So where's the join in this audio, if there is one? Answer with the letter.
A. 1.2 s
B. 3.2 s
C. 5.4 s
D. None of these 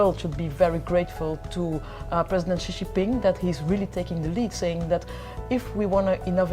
D